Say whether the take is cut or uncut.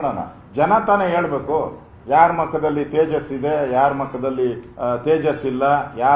uncut